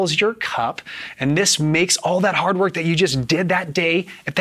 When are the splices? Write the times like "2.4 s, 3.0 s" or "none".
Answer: none